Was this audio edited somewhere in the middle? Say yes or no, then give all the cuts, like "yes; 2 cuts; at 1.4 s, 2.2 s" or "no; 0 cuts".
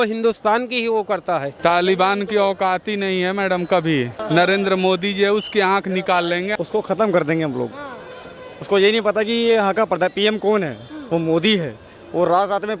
yes; 3 cuts; at 1.5 s, 4.1 s, 6.5 s